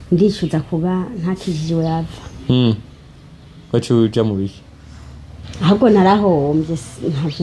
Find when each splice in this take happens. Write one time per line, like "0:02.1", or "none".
none